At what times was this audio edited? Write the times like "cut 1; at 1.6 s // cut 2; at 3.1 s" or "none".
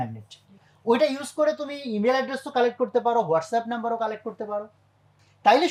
none